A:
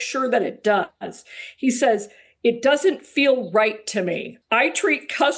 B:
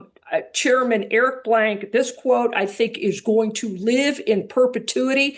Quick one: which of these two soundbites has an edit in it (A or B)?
A